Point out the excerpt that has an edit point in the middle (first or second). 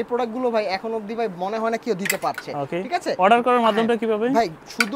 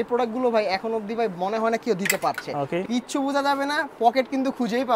second